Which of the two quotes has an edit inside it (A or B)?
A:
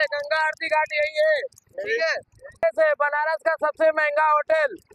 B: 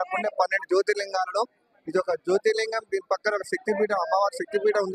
A